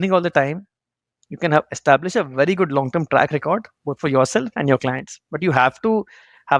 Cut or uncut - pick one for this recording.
uncut